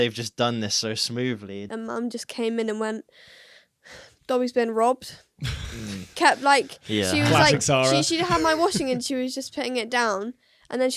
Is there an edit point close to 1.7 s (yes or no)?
yes